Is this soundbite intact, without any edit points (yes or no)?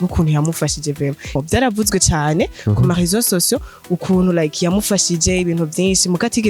no